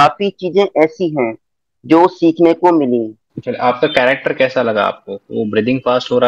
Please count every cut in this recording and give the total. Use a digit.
1